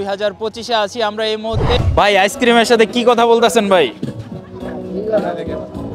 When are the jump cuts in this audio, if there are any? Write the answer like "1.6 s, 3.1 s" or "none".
1.8 s